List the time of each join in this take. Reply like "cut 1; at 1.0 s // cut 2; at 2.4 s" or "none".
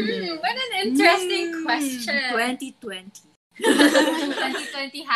none